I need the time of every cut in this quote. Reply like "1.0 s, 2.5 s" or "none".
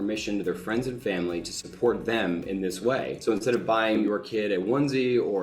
3.1 s, 4.0 s